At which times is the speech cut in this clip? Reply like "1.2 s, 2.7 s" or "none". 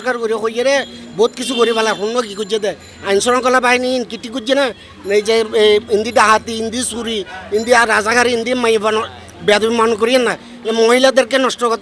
none